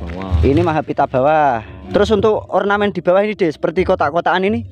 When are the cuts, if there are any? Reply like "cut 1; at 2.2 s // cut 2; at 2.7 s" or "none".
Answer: cut 1; at 1.8 s